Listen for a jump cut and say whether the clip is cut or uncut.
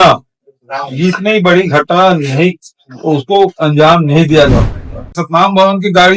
cut